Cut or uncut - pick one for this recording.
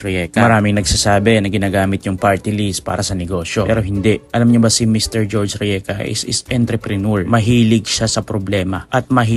uncut